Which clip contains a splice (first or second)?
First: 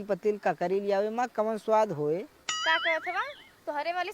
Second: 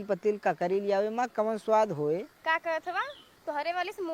second